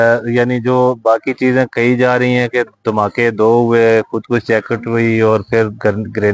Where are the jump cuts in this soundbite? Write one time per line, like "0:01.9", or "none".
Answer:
none